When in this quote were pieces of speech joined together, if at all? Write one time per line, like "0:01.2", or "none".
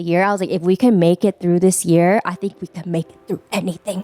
none